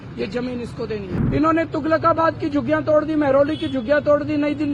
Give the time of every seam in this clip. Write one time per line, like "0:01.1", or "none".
0:01.1